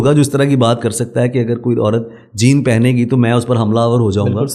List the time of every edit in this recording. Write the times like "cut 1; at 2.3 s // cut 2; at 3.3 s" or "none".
none